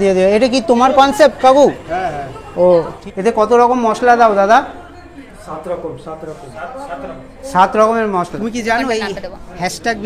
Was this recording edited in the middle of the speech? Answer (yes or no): yes